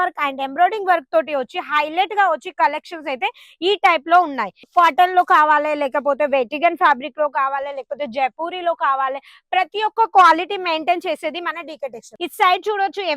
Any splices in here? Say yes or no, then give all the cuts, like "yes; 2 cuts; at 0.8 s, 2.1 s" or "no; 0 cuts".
yes; 2 cuts; at 4.7 s, 12.0 s